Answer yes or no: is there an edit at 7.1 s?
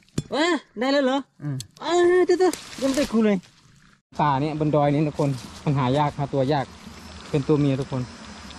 no